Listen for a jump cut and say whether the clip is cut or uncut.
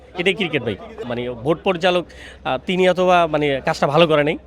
cut